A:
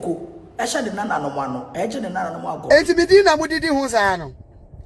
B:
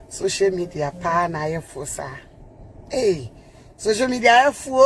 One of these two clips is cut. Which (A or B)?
A